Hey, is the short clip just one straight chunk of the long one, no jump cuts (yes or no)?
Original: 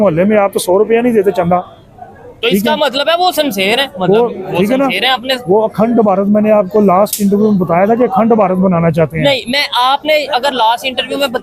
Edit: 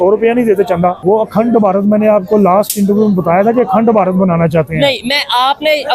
no